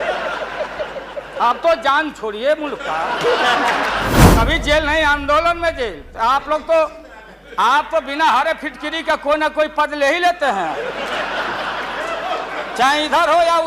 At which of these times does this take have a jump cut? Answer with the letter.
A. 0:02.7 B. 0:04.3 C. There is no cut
B